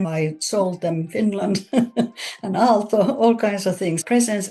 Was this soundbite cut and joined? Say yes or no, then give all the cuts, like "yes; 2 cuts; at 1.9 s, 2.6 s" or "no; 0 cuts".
no; 0 cuts